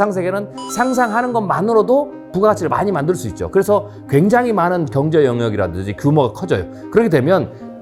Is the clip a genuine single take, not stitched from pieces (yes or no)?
yes